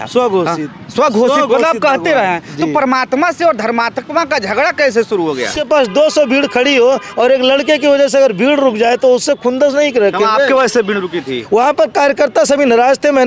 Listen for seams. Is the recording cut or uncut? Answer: cut